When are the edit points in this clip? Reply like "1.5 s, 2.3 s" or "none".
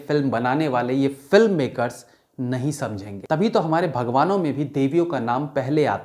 3.1 s